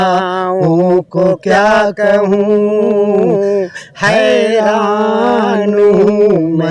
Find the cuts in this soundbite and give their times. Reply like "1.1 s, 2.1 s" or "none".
none

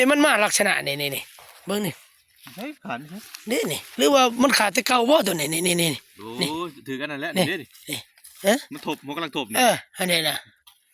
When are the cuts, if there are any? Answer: none

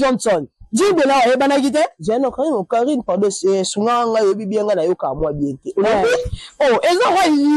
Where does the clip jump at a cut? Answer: none

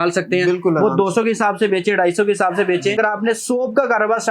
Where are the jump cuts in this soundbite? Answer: 2.9 s

